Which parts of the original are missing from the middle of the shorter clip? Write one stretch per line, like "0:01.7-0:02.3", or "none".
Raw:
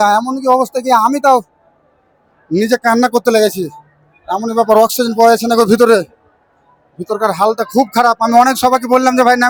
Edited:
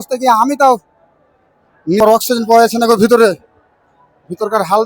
0:02.6-0:04.7